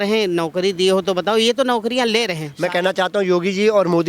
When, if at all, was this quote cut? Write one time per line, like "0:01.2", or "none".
0:02.4